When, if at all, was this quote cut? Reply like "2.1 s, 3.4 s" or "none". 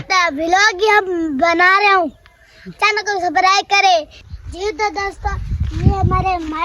none